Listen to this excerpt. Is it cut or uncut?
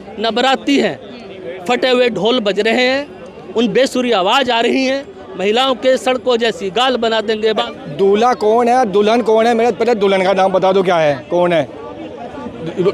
cut